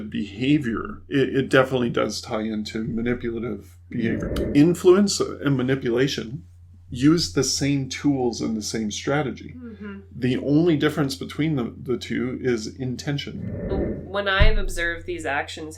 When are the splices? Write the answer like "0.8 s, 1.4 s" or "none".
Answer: 0.9 s, 4.3 s, 13.7 s